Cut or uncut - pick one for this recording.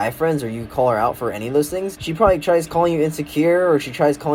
cut